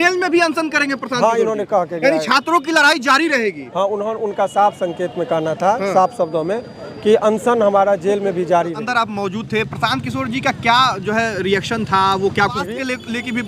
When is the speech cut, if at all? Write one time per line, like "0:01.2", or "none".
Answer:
0:08.9
0:12.6